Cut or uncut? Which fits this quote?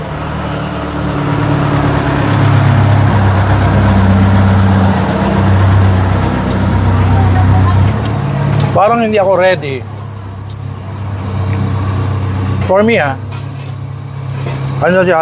cut